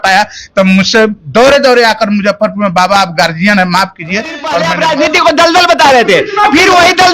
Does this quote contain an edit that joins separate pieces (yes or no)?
yes